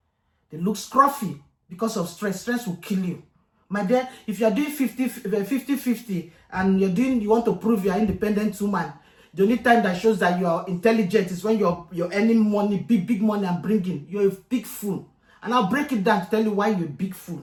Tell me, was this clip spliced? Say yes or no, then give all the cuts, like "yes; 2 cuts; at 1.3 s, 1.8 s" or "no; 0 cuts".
no; 0 cuts